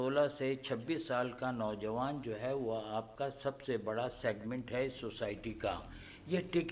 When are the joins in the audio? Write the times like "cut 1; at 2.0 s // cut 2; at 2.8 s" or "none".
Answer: none